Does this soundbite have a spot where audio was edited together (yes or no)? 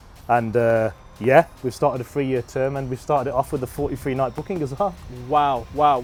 no